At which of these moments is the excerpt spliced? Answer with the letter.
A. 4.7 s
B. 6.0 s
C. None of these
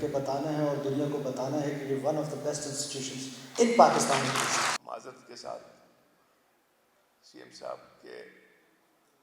A